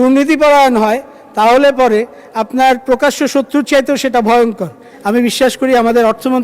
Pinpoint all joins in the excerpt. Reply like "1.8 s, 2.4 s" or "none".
4.9 s